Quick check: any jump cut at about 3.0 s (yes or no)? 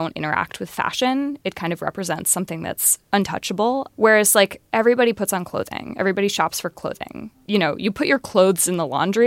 yes